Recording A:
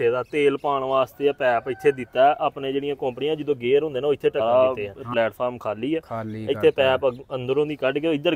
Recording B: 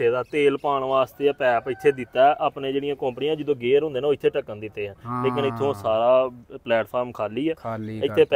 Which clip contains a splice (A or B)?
A